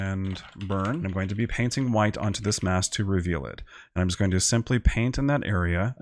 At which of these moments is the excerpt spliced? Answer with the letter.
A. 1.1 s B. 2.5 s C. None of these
A